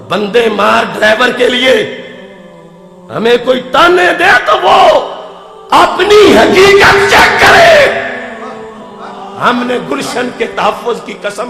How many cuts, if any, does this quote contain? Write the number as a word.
zero